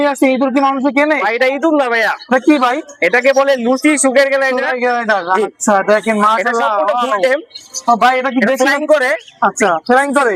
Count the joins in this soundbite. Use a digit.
0